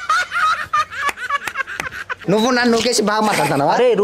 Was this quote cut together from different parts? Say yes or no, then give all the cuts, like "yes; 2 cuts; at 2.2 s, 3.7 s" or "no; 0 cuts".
yes; 1 cut; at 2.2 s